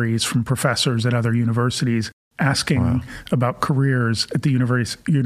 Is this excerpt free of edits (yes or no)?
no